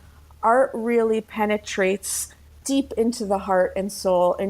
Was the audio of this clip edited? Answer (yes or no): yes